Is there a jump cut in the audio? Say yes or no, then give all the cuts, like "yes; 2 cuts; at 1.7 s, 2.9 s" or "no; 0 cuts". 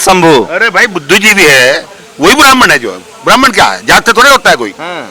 no; 0 cuts